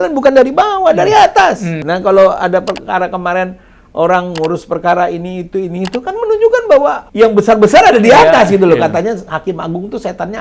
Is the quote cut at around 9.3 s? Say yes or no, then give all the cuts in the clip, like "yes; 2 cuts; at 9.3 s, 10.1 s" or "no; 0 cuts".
no; 2 cuts; at 1.8 s, 7.0 s